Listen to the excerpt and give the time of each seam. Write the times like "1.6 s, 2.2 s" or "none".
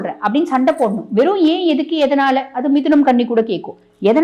none